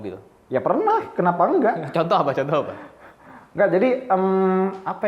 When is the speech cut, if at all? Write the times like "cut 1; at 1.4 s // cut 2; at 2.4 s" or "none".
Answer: none

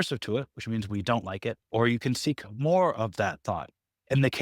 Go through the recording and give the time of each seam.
cut 1; at 1.6 s

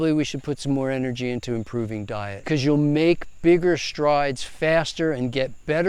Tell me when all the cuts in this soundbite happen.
cut 1; at 2.3 s

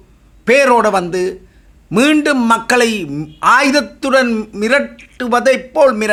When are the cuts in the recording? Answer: none

